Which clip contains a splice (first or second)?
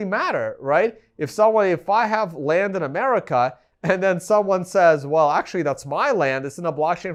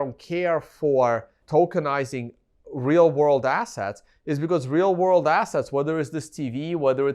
second